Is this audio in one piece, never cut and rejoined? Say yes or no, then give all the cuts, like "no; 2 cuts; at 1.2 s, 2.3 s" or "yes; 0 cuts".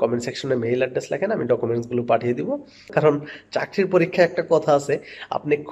no; 1 cut; at 2.9 s